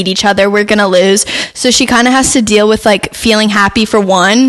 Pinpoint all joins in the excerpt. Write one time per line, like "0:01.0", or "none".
none